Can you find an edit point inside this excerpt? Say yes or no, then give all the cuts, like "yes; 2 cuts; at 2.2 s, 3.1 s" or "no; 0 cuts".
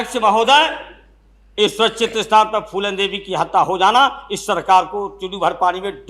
no; 0 cuts